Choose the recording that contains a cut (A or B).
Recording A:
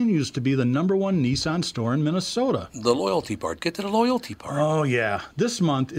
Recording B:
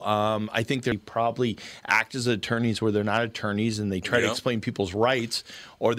B